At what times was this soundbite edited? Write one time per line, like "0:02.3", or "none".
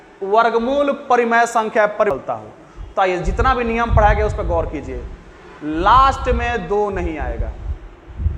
0:02.1